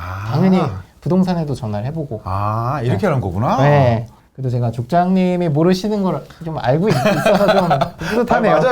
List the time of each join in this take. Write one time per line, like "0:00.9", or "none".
0:04.1